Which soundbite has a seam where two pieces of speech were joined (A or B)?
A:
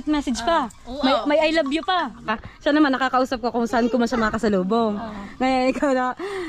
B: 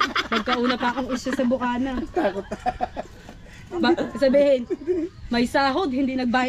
A